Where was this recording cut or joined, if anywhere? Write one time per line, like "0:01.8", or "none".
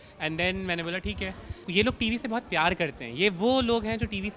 0:01.7